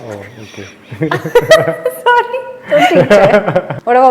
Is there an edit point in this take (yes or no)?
no